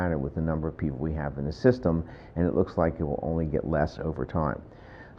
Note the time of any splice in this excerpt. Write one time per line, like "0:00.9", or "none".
0:01.6